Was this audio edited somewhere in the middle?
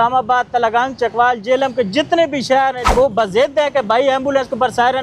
yes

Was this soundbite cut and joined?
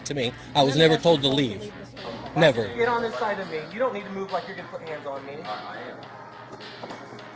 yes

